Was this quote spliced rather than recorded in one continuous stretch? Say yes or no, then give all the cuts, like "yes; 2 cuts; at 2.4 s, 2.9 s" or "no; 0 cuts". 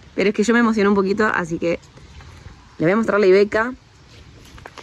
no; 0 cuts